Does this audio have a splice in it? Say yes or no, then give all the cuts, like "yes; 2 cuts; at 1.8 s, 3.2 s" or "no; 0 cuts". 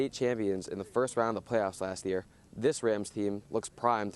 no; 0 cuts